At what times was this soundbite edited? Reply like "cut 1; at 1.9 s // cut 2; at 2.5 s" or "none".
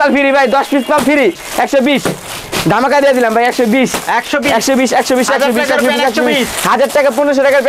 cut 1; at 1.4 s